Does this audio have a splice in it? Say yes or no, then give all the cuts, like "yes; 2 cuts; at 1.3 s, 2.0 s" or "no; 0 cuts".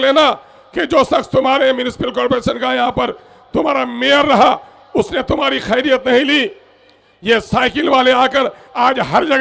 no; 0 cuts